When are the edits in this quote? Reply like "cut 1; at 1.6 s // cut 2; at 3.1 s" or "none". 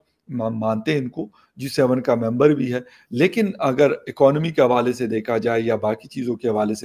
none